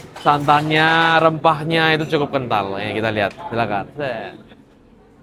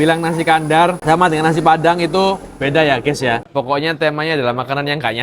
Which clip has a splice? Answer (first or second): second